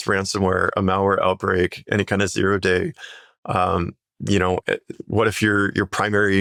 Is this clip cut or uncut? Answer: uncut